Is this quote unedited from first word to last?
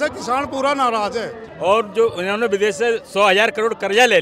no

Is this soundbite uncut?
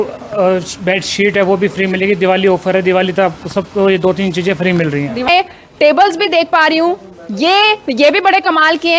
no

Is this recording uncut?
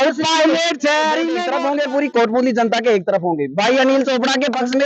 no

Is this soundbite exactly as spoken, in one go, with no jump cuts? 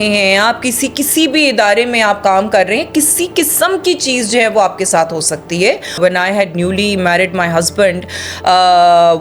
no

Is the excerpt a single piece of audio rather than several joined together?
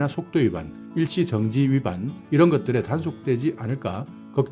yes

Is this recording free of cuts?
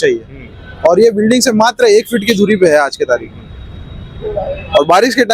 yes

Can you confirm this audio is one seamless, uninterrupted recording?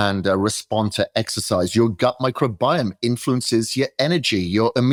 yes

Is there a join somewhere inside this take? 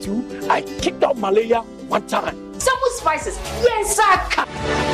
no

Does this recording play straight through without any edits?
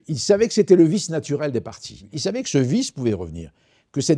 no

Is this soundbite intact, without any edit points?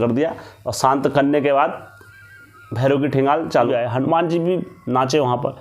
no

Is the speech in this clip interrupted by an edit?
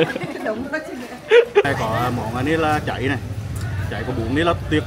yes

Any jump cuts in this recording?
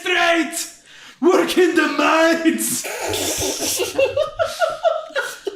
no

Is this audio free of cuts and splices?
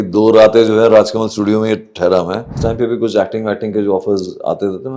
no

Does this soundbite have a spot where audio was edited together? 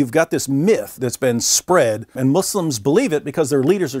yes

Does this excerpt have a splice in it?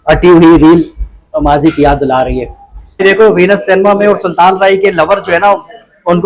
yes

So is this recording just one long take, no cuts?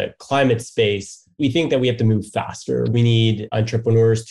no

